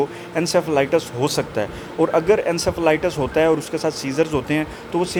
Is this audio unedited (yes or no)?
yes